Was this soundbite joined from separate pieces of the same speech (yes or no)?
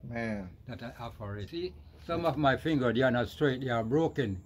yes